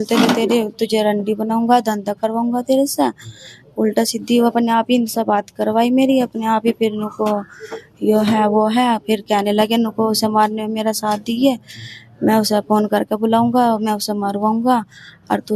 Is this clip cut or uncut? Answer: uncut